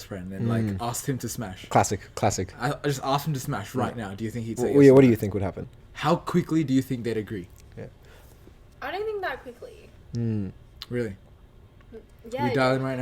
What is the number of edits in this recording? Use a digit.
1